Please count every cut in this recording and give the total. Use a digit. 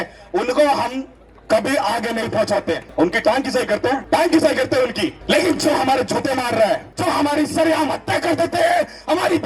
4